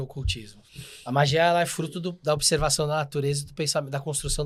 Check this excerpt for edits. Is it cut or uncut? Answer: uncut